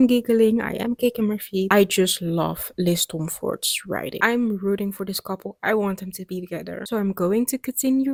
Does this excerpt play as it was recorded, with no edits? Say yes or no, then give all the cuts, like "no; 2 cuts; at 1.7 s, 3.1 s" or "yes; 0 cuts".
yes; 0 cuts